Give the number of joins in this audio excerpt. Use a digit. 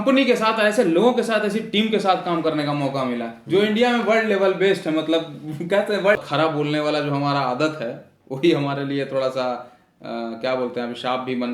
1